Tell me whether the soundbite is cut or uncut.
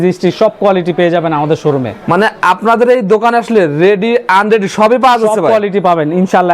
uncut